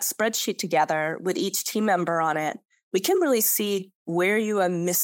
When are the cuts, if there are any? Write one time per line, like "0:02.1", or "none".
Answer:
none